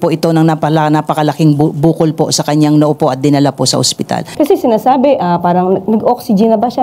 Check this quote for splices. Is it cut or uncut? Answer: cut